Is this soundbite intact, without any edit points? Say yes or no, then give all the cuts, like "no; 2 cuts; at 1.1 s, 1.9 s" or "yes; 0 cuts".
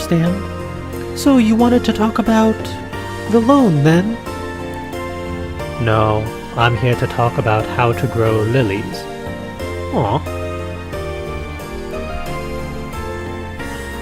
no; 1 cut; at 2.2 s